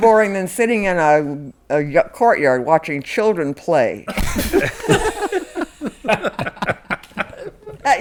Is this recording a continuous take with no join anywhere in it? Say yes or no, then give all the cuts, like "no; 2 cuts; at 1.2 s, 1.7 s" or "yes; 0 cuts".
yes; 0 cuts